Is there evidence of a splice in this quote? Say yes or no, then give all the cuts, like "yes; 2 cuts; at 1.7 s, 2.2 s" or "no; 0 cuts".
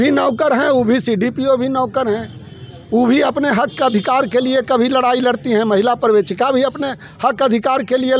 no; 0 cuts